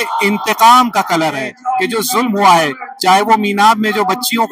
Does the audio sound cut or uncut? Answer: cut